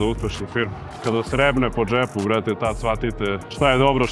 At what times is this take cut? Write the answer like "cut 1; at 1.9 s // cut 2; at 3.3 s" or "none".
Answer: cut 1; at 0.9 s